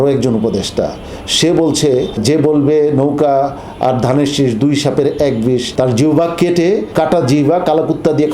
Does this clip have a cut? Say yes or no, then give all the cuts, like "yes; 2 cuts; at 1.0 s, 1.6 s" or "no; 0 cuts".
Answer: yes; 3 cuts; at 2.2 s, 5.7 s, 6.9 s